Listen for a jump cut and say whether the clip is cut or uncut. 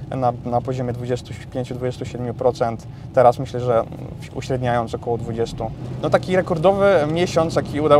cut